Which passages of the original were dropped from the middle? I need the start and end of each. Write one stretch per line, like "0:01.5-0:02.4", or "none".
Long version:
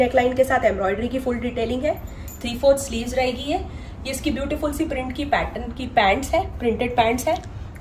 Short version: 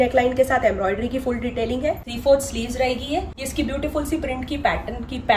0:02.1-0:02.5
0:03.8-0:04.1